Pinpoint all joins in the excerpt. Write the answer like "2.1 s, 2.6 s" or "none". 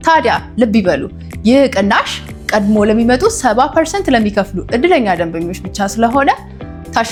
none